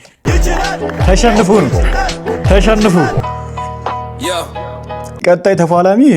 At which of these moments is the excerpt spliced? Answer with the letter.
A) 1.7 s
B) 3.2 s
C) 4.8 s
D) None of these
B